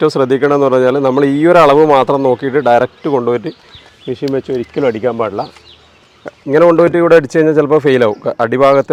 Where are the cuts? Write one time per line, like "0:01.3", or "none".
none